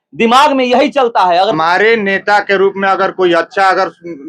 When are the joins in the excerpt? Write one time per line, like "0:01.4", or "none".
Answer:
0:01.5